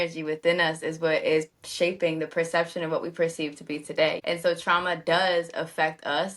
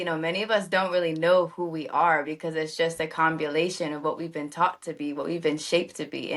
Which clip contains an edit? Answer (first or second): first